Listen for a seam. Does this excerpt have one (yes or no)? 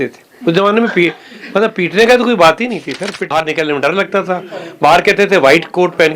yes